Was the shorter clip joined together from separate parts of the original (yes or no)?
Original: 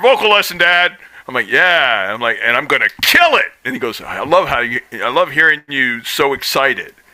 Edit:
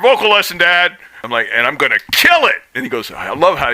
yes